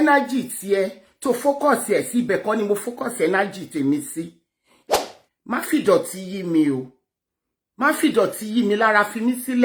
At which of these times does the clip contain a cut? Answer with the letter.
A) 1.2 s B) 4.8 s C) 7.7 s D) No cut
B